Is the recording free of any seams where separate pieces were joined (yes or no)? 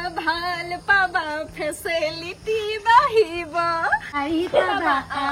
no